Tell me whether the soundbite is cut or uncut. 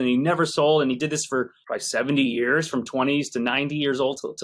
uncut